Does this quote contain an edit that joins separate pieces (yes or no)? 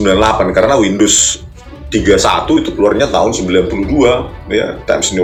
no